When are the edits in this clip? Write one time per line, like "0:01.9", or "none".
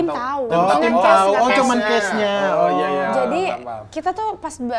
none